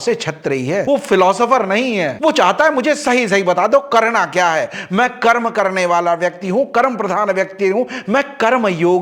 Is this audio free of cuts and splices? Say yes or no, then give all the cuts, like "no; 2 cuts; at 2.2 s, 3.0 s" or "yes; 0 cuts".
yes; 0 cuts